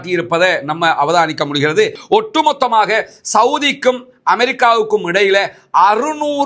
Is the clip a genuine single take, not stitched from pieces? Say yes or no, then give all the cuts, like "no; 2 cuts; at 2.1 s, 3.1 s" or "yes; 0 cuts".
no; 1 cut; at 2.0 s